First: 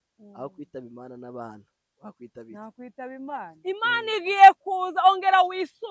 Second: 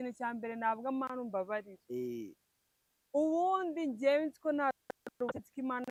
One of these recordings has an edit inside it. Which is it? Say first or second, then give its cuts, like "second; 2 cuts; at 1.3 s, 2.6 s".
first; 1 cut; at 3.5 s